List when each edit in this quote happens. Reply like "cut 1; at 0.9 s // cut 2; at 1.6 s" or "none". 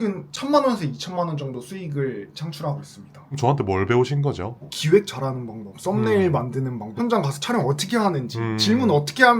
cut 1; at 3.3 s // cut 2; at 4.7 s // cut 3; at 6.8 s